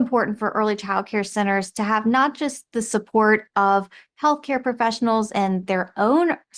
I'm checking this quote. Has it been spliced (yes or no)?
no